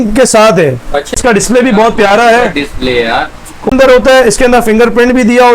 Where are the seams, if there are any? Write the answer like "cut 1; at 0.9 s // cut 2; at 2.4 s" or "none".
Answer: cut 1; at 1.2 s // cut 2; at 3.7 s